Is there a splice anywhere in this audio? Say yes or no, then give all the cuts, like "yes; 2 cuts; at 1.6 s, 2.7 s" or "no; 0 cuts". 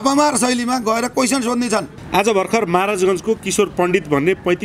yes; 1 cut; at 2.0 s